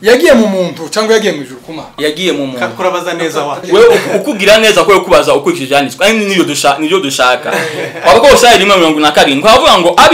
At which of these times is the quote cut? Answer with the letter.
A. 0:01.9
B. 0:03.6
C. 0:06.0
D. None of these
B